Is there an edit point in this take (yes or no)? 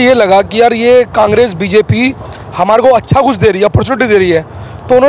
no